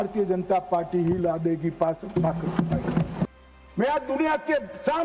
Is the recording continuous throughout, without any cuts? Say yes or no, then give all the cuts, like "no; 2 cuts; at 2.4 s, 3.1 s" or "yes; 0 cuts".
no; 1 cut; at 3.2 s